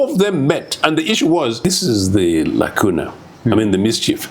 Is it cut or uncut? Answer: cut